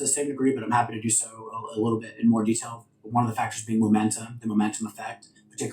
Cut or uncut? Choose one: uncut